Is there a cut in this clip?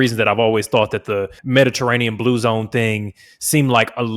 yes; 1 cut; at 1.4 s

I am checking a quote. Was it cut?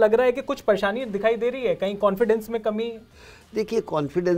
no; 0 cuts

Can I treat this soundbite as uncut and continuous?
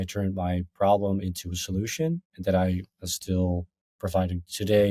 yes; 0 cuts

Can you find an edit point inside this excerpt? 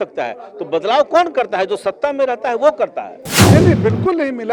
yes; 1 cut; at 3.3 s

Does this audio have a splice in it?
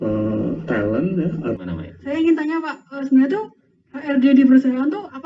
yes; 1 cut; at 1.6 s

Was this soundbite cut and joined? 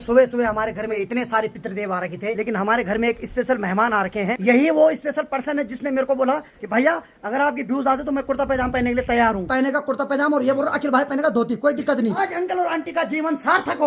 yes; 6 cuts; at 0.9 s, 2.4 s, 4.4 s, 6.5 s, 9.4 s, 12.2 s

